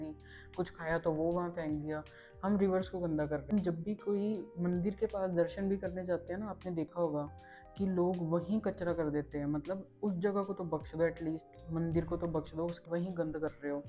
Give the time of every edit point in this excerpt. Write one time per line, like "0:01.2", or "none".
0:03.5
0:12.8